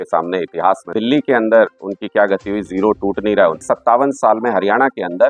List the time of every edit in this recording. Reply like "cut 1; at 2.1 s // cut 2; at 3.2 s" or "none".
cut 1; at 0.9 s // cut 2; at 3.6 s